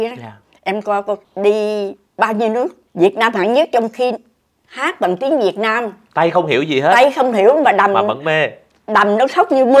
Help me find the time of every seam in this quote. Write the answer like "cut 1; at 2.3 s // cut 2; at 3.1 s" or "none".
cut 1; at 1.3 s // cut 2; at 2.8 s // cut 3; at 6.0 s